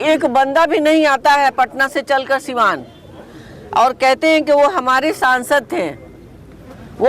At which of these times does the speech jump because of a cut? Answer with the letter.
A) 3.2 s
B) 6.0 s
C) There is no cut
C